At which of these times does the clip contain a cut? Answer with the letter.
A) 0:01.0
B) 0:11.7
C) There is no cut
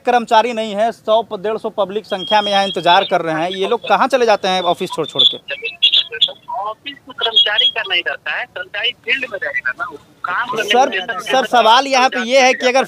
C